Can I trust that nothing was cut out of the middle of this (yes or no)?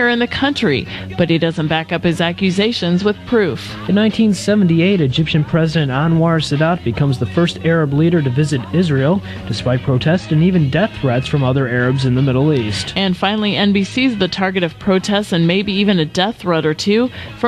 yes